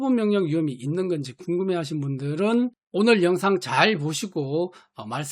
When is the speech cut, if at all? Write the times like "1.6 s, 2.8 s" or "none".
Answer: 2.8 s